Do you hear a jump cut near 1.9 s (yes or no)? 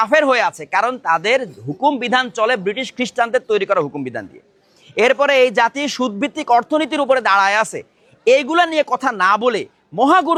no